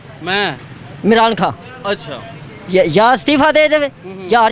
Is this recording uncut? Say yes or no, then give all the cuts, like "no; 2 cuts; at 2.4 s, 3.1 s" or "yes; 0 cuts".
yes; 0 cuts